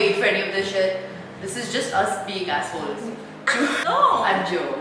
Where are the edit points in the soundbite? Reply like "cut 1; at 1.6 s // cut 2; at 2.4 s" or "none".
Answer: cut 1; at 3.8 s